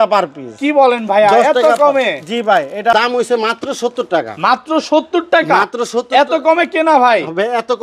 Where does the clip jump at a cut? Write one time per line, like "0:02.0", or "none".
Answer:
0:02.9